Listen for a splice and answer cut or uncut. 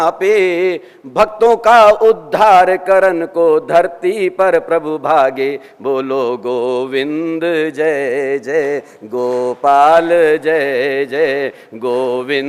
uncut